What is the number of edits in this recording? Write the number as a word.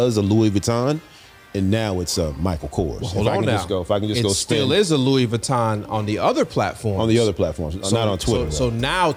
zero